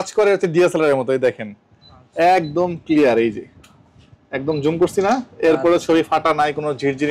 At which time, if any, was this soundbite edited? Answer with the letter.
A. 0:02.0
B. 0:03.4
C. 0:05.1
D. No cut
D